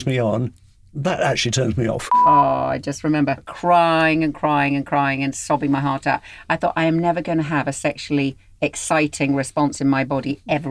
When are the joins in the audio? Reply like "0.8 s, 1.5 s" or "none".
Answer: 2.1 s, 3.5 s